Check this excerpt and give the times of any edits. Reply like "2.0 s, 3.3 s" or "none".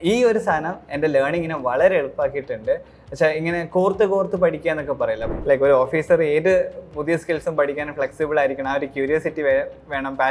5.3 s